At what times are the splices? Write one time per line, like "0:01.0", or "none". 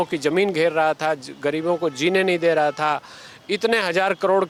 none